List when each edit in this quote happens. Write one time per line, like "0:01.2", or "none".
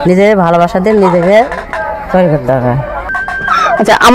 0:03.2